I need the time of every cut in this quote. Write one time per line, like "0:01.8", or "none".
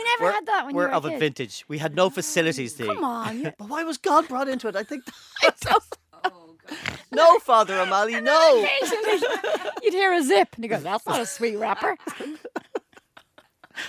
0:03.6